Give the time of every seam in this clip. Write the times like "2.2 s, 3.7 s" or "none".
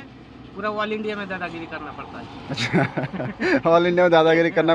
none